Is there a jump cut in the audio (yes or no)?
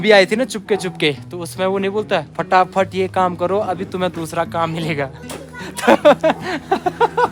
no